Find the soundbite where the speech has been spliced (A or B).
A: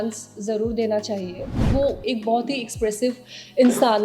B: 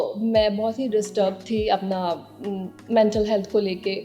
A